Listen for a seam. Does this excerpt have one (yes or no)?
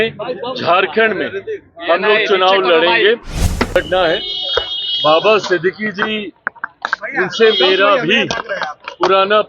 yes